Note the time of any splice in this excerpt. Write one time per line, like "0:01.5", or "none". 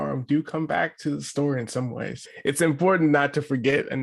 0:02.1